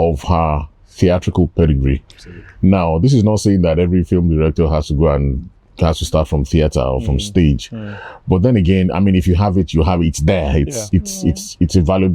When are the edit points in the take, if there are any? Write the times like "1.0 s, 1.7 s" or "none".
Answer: none